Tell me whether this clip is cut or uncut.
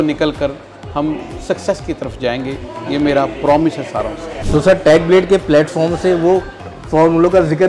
uncut